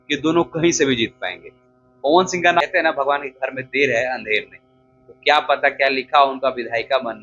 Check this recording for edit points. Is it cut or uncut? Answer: cut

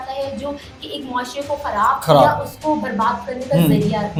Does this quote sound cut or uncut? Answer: uncut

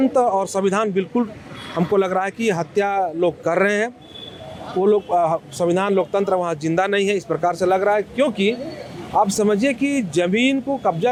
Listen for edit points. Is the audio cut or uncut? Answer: uncut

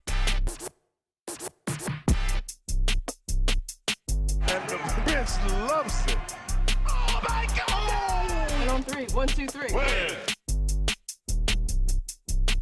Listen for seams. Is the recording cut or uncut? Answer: cut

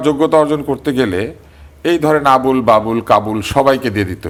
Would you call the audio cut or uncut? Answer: uncut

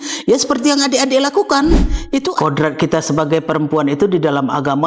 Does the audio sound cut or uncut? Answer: cut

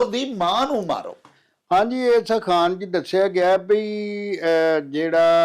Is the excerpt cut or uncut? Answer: uncut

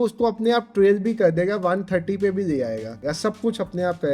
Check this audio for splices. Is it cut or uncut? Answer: cut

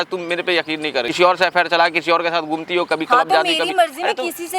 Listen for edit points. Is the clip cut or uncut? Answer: cut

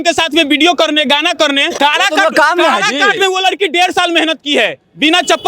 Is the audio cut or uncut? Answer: cut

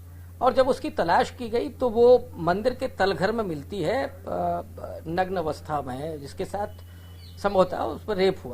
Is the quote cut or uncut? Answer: uncut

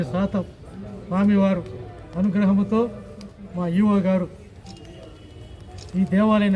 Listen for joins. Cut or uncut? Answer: uncut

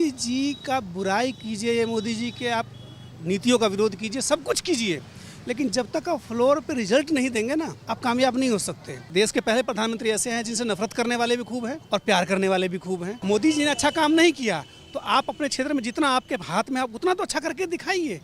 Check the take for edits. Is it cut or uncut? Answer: cut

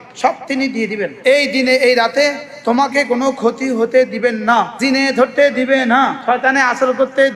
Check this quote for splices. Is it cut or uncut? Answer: cut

